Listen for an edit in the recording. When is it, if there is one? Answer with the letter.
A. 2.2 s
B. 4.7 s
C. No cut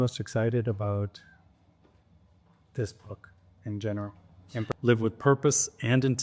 B